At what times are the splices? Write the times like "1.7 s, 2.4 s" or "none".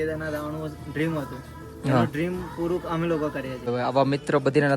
3.6 s